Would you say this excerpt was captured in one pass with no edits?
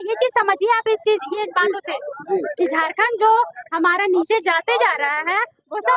yes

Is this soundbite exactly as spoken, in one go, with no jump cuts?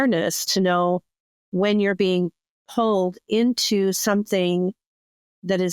yes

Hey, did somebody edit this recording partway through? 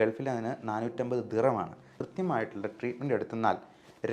yes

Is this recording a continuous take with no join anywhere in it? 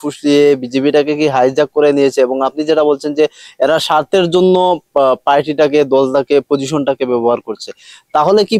yes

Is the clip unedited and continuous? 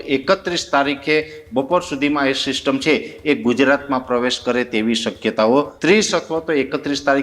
no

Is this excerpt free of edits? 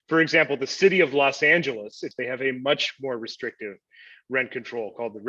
no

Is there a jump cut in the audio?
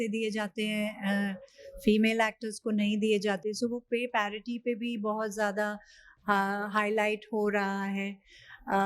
no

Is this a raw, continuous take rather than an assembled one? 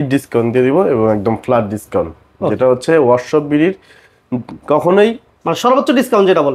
yes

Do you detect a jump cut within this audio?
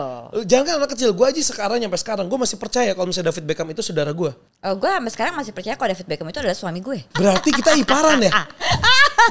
yes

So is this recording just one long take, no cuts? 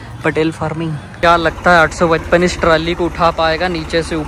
no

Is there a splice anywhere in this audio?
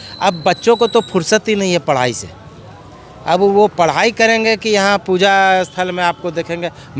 no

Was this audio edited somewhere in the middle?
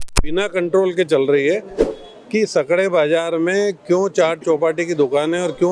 yes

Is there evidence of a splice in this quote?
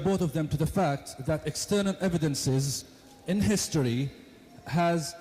yes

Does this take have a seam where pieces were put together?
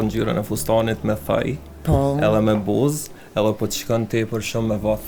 no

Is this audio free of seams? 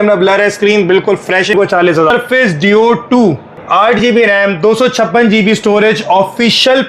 no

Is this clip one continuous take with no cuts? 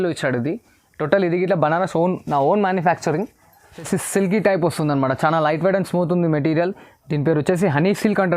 no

